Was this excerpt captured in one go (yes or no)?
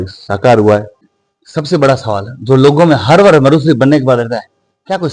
no